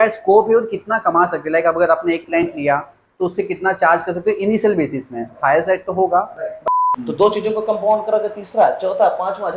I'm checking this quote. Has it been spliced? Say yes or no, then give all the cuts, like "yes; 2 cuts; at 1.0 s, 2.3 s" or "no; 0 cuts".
yes; 1 cut; at 6.6 s